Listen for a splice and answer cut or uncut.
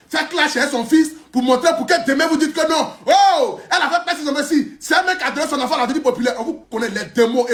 uncut